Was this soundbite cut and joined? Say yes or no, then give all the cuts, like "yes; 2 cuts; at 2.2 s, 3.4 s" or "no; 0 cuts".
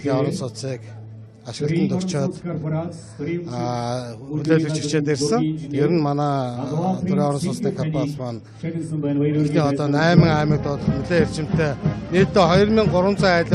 yes; 1 cut; at 1.8 s